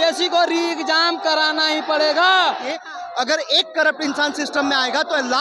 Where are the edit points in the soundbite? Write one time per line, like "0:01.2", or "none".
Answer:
0:02.6

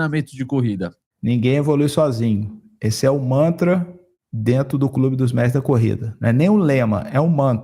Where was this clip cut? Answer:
0:01.0

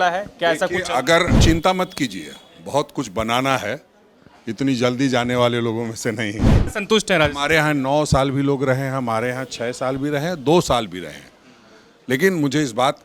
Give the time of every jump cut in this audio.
0:01.4
0:06.7

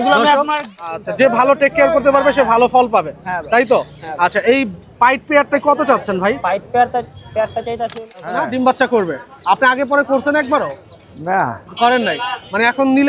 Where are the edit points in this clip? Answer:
0:00.9
0:08.3

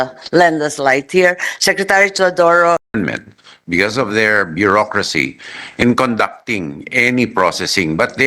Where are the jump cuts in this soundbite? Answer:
0:02.9

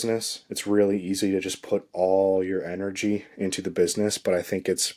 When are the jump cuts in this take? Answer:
none

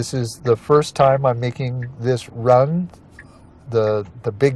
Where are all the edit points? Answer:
none

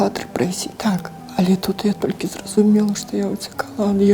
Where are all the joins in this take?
0:01.2

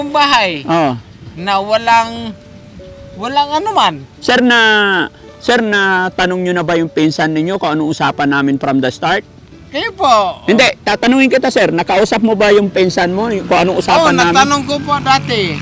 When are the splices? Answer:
none

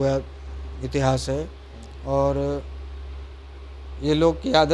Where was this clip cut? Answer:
none

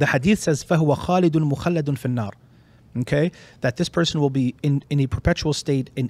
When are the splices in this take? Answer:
none

